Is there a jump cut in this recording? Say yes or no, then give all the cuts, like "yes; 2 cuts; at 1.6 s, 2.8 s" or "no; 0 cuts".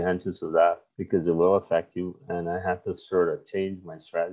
yes; 1 cut; at 0.9 s